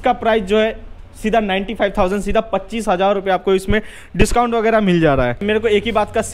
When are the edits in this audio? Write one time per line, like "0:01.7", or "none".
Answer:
0:05.4